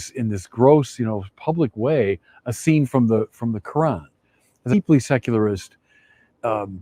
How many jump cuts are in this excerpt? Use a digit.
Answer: 1